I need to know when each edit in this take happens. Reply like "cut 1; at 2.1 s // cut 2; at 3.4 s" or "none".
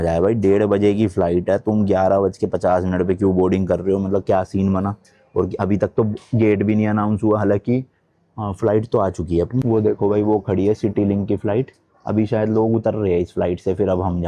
none